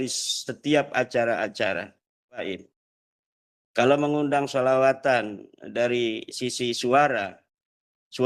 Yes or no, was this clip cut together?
yes